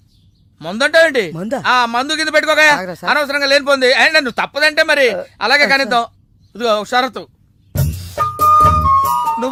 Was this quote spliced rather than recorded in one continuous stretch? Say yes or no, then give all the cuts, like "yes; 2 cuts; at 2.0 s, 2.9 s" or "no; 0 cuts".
no; 0 cuts